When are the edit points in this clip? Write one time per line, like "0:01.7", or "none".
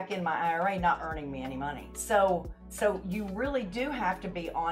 0:01.9